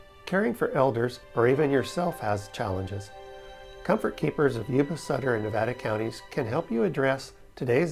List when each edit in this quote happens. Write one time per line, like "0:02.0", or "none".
0:04.6